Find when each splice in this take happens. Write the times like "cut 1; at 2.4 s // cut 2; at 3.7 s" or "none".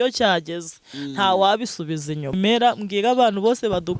cut 1; at 2.4 s